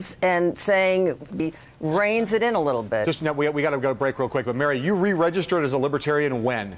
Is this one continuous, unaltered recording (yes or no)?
yes